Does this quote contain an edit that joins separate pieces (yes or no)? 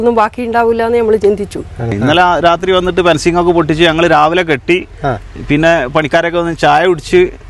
yes